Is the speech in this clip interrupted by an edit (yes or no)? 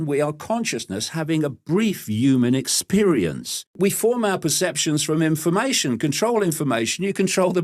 yes